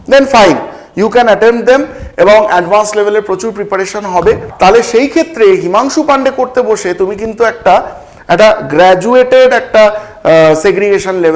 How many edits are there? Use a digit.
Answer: 1